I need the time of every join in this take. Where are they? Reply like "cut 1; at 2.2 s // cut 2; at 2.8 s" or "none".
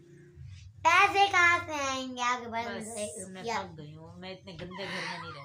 none